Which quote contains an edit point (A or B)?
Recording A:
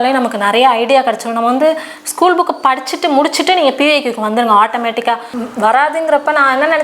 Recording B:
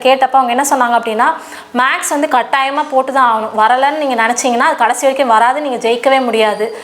A